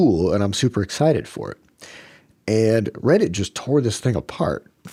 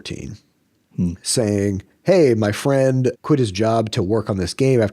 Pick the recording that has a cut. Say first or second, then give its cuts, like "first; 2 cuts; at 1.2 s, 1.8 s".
second; 1 cut; at 3.2 s